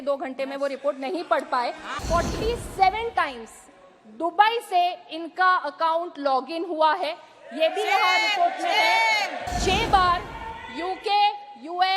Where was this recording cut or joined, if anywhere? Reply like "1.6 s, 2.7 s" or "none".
2.0 s, 9.4 s